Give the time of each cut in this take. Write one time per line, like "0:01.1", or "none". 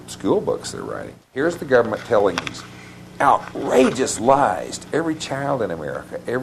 0:01.2

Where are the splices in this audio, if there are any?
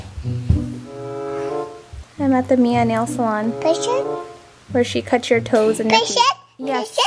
0:02.1

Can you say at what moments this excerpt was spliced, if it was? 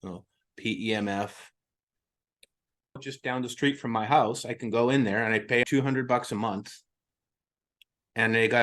0:02.9
0:05.7

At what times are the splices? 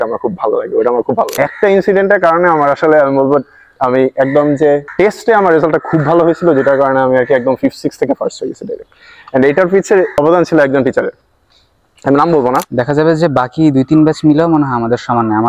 0:01.3
0:12.7

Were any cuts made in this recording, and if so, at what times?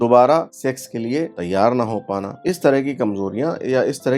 0:01.1
0:02.3

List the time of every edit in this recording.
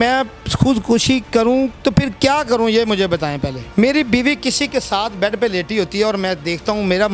0:01.7
0:03.5

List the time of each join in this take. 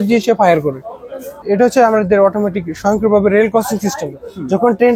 0:01.3

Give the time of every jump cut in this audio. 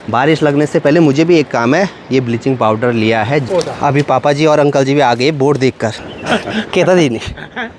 0:03.5
0:06.1

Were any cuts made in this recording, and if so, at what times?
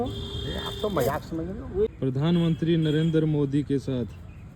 0:01.9

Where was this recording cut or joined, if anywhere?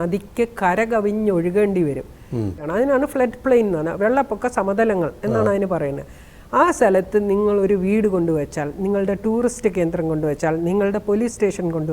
0:02.6

